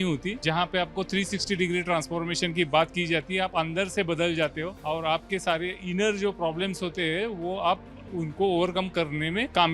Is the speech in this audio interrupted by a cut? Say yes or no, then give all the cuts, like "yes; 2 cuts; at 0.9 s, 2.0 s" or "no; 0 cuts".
no; 0 cuts